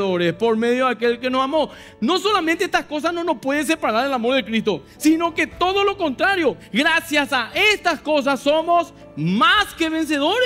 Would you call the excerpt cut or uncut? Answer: uncut